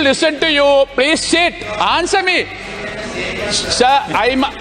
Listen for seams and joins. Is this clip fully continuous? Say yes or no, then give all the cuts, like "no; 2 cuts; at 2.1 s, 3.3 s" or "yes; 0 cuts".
yes; 0 cuts